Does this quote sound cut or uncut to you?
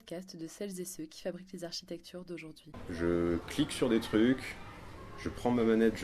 cut